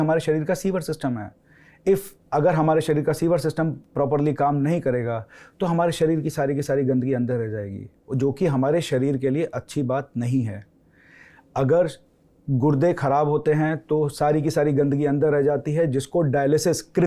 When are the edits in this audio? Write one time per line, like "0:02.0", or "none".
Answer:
none